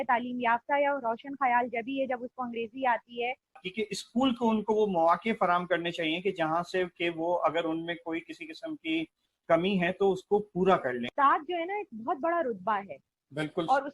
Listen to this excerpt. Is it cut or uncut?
cut